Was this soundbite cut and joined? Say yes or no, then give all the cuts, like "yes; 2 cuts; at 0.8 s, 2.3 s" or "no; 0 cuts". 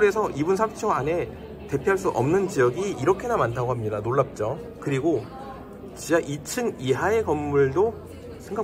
no; 0 cuts